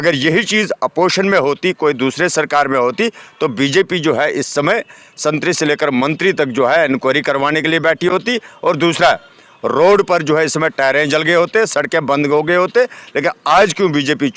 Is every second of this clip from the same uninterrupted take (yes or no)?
yes